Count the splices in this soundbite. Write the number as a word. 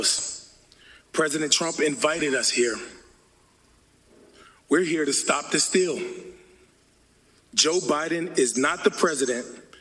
one